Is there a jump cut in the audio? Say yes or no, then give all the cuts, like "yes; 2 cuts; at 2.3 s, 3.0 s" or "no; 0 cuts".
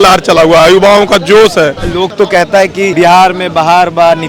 yes; 2 cuts; at 1.8 s, 2.9 s